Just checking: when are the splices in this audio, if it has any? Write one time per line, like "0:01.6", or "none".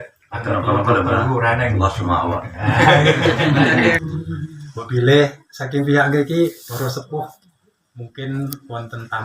0:04.0